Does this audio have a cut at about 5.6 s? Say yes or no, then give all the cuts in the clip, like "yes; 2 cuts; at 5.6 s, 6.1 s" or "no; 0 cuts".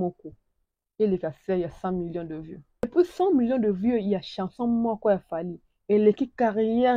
no; 1 cut; at 2.8 s